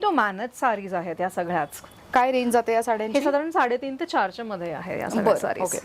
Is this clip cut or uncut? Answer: uncut